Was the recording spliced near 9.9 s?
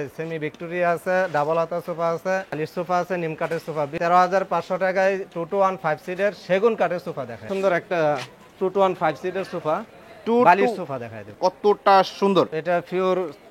no; 5 cuts; at 2.6 s, 3.9 s, 7.5 s, 11.3 s, 12.6 s

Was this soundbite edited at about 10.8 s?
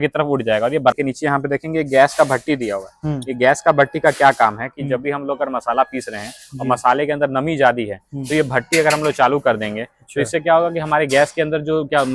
no; 1 cut; at 0.9 s

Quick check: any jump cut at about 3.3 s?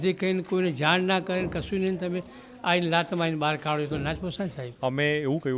no; 1 cut; at 4.6 s

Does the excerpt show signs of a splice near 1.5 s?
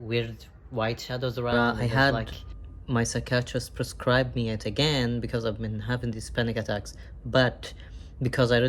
yes; 1 cut; at 1.5 s

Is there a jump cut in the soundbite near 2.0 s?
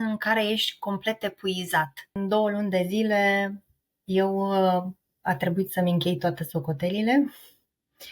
yes; 1 cut; at 2.0 s

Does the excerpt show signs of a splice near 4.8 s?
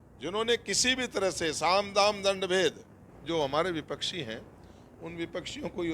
no; 1 cut; at 3.1 s

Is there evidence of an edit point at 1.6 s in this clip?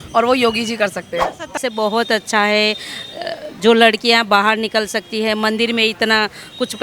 yes; 1 cut; at 1.6 s

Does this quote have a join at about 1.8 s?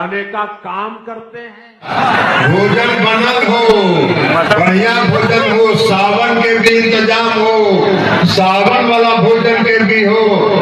yes; 1 cut; at 1.8 s

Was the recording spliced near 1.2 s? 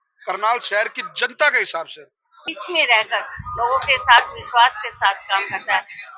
no; 1 cut; at 2.4 s

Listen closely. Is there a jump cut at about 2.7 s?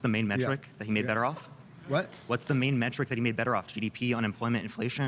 no; 1 cut; at 1.3 s

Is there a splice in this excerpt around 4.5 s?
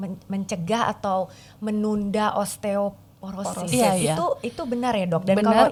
no; 0 cuts

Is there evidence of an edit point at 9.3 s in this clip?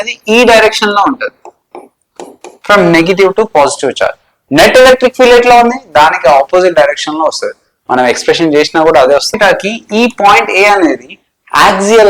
yes; 1 cut; at 9.3 s

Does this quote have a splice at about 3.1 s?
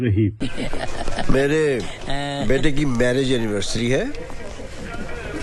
no; 0 cuts

